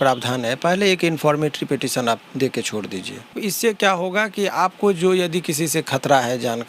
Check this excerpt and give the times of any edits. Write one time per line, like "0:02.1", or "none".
0:03.4